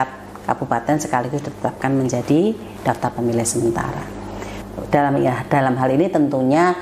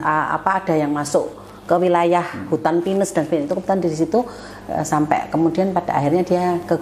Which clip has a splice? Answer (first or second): first